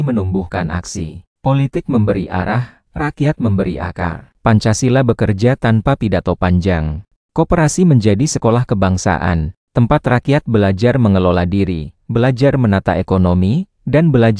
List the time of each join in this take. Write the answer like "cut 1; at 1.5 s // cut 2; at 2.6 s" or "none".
cut 1; at 4.3 s // cut 2; at 7.1 s